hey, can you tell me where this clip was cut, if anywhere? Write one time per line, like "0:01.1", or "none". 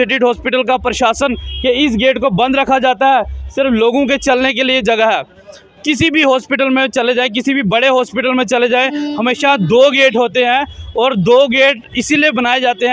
none